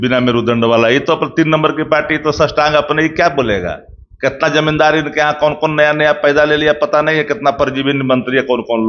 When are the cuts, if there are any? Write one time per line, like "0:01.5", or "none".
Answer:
none